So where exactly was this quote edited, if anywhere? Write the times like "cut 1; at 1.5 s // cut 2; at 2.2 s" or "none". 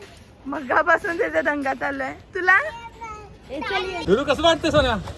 cut 1; at 4.0 s